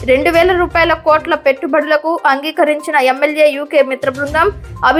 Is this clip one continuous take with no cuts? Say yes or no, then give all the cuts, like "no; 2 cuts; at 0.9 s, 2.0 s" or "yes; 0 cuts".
yes; 0 cuts